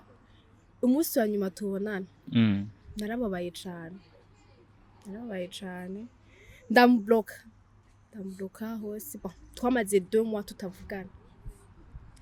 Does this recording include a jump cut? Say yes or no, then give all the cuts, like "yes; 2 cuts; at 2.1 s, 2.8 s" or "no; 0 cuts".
no; 0 cuts